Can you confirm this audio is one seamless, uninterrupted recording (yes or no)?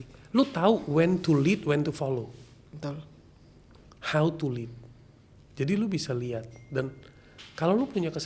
yes